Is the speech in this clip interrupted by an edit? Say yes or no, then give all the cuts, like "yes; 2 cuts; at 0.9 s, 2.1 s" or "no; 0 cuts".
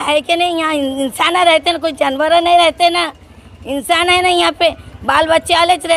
no; 0 cuts